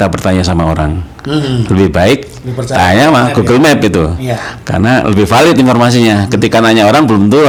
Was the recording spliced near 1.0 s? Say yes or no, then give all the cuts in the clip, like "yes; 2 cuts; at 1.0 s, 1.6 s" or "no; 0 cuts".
no; 0 cuts